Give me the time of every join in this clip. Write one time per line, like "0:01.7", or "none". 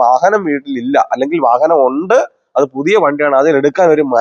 none